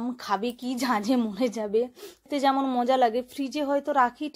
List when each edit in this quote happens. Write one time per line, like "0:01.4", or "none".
0:02.2